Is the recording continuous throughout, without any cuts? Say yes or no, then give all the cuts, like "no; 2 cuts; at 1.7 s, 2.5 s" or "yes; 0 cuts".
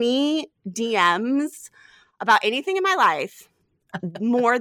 yes; 0 cuts